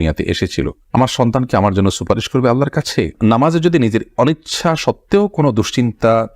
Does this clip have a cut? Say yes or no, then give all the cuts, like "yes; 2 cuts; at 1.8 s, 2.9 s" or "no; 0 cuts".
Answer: yes; 1 cut; at 3.1 s